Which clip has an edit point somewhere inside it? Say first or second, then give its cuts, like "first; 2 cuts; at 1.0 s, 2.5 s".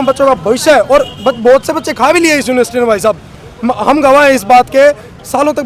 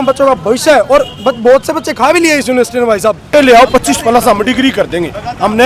second; 1 cut; at 3.3 s